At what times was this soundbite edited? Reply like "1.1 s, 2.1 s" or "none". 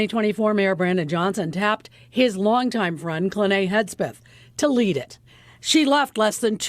none